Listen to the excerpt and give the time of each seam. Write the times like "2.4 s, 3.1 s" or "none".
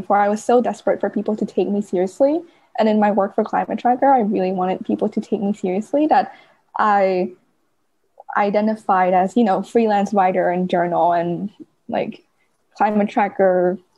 none

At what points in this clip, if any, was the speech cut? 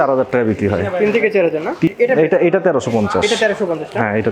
1.9 s

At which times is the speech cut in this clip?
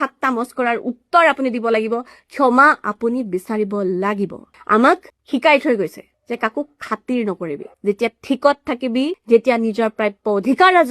4.5 s, 5.1 s, 6.1 s, 7.7 s, 9.2 s

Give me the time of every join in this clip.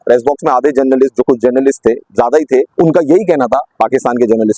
2.7 s

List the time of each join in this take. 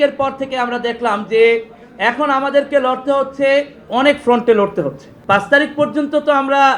3.8 s, 5.1 s

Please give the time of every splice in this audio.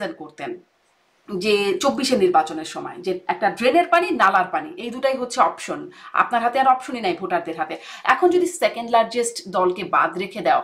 none

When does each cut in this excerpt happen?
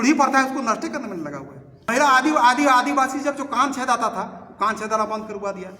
1.9 s

